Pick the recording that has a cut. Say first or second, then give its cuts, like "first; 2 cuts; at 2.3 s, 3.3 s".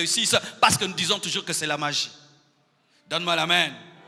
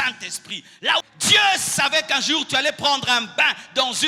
second; 1 cut; at 1.0 s